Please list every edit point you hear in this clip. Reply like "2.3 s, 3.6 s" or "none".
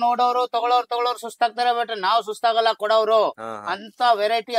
none